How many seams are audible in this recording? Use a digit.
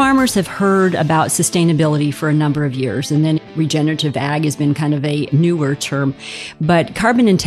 2